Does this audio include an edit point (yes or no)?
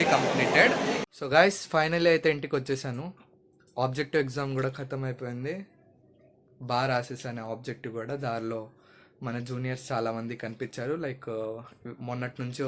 yes